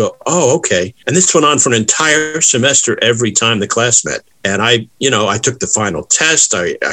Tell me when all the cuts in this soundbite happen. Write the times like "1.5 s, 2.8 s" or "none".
1.0 s, 4.7 s